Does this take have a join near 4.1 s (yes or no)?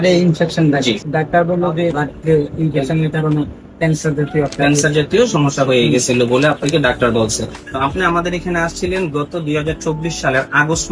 no